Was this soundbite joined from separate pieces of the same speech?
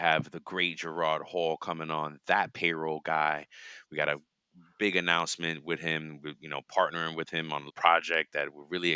yes; 1 cut; at 7.7 s

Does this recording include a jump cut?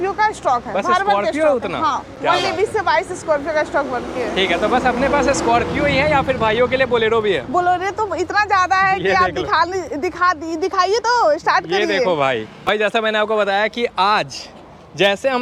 no; 0 cuts

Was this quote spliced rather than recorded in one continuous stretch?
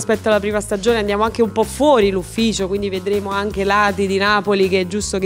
no; 0 cuts

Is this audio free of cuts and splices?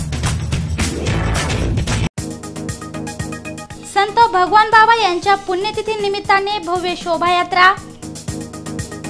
no; 1 cut; at 1.8 s

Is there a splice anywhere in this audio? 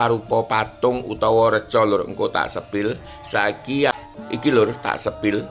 yes; 1 cut; at 4.0 s

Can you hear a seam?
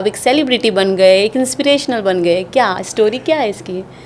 no; 0 cuts

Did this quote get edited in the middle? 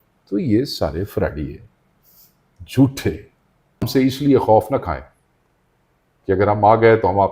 yes; 1 cut; at 3.9 s

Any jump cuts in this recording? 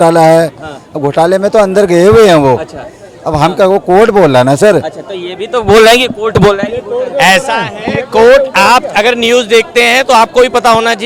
no; 0 cuts

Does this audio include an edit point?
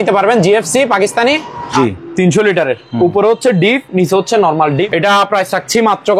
yes; 2 cuts; at 1.7 s, 4.9 s

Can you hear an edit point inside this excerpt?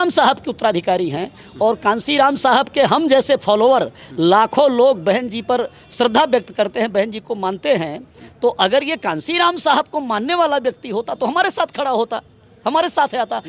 no; 0 cuts

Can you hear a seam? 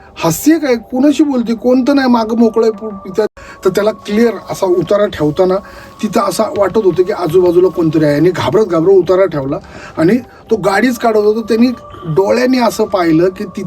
yes; 1 cut; at 3.3 s

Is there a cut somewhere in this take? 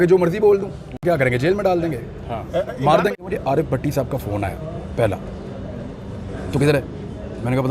yes; 2 cuts; at 1.0 s, 3.1 s

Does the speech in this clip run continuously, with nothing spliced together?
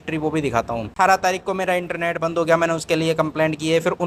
no; 1 cut; at 0.9 s

